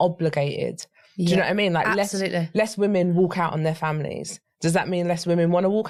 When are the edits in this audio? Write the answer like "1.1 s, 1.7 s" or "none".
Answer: none